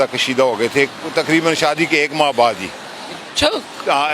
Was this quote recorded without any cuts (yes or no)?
yes